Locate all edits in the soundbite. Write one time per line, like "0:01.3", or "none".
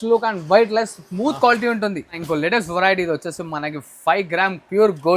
0:02.2